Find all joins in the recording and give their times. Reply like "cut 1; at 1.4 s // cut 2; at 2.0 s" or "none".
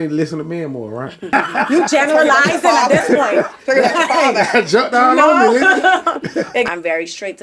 cut 1; at 1.3 s // cut 2; at 6.5 s